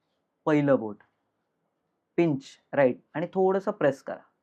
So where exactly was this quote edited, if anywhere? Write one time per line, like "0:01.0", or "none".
none